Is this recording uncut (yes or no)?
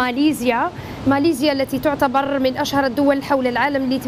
yes